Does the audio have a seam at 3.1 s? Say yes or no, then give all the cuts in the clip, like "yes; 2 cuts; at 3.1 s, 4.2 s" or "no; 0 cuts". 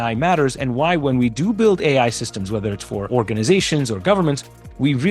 yes; 1 cut; at 3.1 s